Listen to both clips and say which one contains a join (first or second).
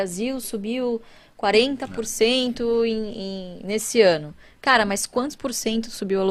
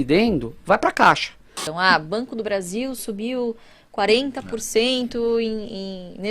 second